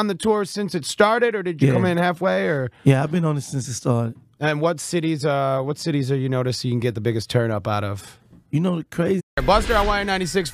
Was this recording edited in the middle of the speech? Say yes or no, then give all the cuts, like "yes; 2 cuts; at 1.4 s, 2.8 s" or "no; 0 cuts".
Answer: no; 0 cuts